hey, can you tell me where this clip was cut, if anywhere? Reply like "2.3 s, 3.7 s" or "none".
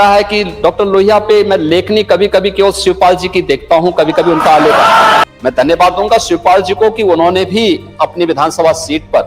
5.2 s